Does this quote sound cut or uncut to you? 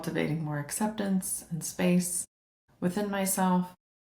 uncut